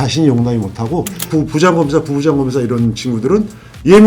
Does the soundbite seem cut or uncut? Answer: cut